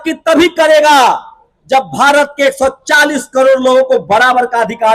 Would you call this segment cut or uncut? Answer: uncut